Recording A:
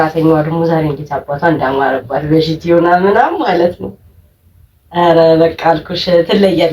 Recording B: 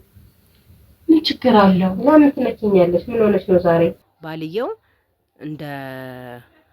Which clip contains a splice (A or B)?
B